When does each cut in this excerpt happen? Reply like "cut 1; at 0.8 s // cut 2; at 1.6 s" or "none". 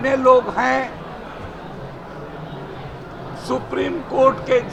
none